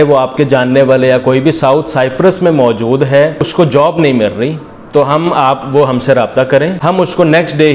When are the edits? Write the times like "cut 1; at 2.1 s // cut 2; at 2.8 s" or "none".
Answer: cut 1; at 3.5 s // cut 2; at 6.8 s

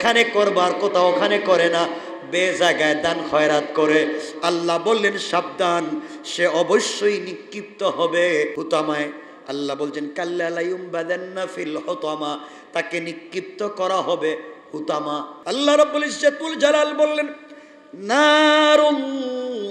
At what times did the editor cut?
cut 1; at 8.6 s // cut 2; at 15.3 s

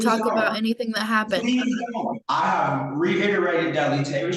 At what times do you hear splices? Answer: cut 1; at 2.2 s

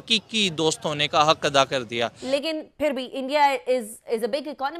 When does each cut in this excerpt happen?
cut 1; at 2.2 s

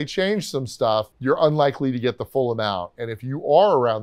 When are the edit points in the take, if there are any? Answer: cut 1; at 1.1 s

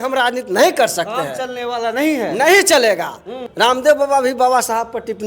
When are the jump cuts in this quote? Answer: cut 1; at 3.4 s

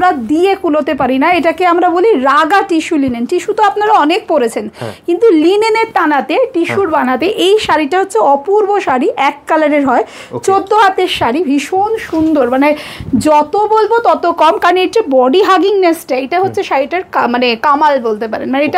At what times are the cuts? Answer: none

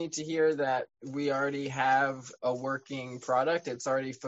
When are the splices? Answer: cut 1; at 0.9 s // cut 2; at 2.3 s

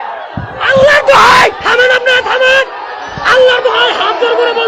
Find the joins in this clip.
none

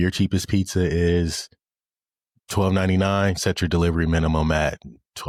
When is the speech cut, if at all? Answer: none

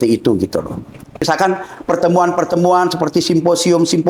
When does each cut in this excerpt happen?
cut 1; at 1.2 s

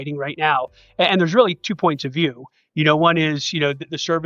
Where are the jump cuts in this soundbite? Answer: none

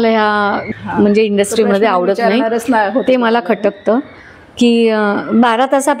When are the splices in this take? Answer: none

